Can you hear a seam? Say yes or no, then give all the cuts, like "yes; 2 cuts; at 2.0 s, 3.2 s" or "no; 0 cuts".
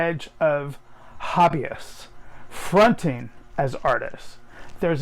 no; 0 cuts